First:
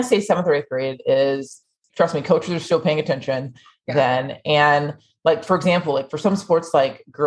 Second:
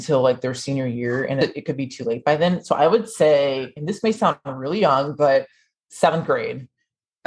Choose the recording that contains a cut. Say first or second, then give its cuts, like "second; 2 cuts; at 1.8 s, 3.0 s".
second; 1 cut; at 1.4 s